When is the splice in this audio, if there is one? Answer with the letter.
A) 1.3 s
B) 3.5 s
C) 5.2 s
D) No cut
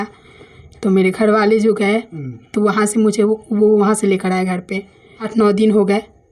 C